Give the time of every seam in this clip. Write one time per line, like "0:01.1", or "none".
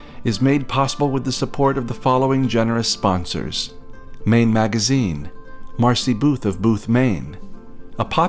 none